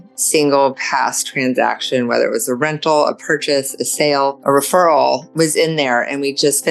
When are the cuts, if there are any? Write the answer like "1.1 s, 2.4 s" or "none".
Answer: 4.4 s, 5.3 s